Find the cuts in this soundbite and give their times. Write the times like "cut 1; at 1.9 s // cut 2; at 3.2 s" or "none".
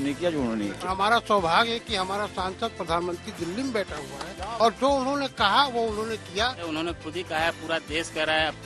cut 1; at 0.8 s // cut 2; at 4.5 s // cut 3; at 6.6 s